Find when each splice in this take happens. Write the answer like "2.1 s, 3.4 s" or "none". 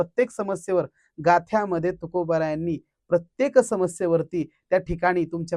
none

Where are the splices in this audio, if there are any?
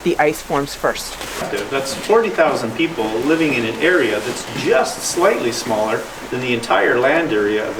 1.4 s

